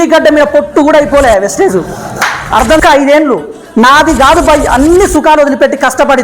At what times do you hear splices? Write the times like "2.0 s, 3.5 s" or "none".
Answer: 2.7 s